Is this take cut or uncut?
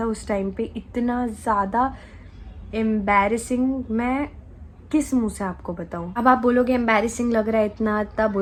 uncut